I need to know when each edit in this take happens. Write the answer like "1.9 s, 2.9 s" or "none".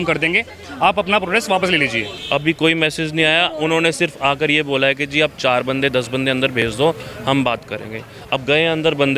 2.1 s